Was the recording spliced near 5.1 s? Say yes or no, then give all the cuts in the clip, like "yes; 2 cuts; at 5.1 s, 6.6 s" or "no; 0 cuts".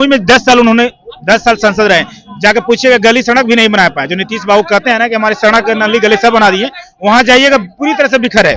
no; 0 cuts